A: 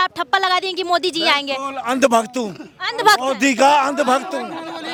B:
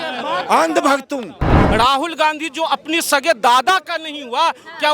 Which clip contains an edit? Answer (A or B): B